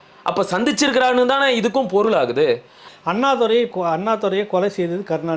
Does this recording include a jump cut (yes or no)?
yes